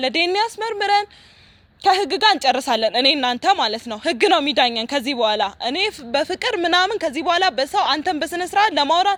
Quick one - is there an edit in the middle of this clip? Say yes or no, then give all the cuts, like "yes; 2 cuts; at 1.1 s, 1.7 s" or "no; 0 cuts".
no; 0 cuts